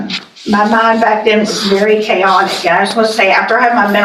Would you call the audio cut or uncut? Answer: uncut